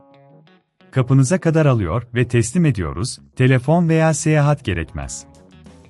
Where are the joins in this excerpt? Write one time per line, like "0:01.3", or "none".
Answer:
0:00.9
0:05.1